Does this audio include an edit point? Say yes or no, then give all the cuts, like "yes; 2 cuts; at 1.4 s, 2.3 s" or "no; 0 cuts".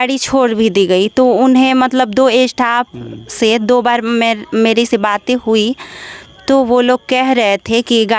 no; 0 cuts